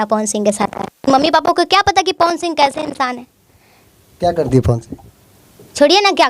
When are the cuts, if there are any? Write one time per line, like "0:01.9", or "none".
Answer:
none